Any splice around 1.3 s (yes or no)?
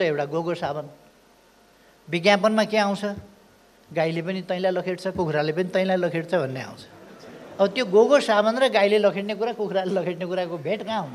no